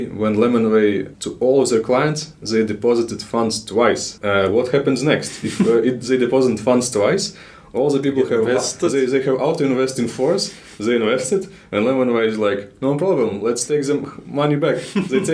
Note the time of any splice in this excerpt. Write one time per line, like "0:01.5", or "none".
0:01.1
0:04.1